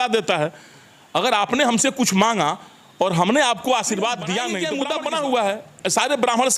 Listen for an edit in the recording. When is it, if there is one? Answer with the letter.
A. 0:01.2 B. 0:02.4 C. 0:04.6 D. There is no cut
C